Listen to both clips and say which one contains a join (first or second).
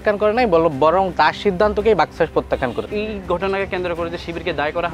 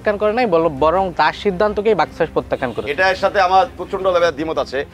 first